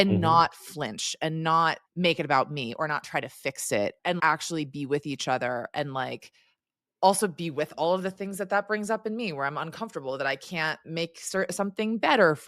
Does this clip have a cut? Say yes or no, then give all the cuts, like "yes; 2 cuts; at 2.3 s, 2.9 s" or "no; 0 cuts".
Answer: yes; 1 cut; at 4.1 s